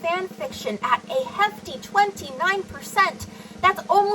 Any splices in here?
no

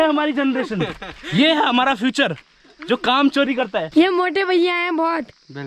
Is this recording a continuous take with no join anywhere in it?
no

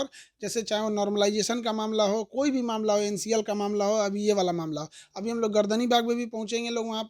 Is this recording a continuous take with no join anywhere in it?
yes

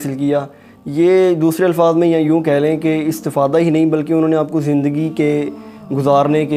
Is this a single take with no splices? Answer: yes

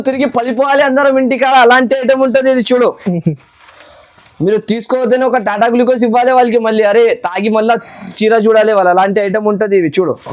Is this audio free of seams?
yes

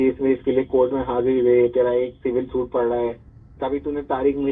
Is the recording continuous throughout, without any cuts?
yes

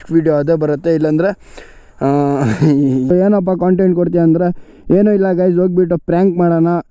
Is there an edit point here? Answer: yes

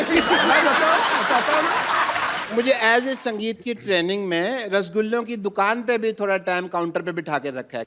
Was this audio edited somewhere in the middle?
yes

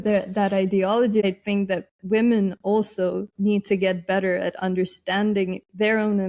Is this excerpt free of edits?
no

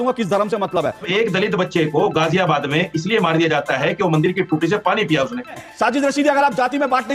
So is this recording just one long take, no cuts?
no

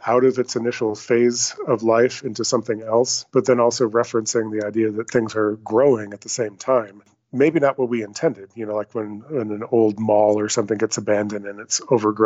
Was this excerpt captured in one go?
yes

